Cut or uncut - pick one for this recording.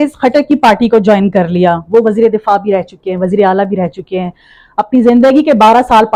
uncut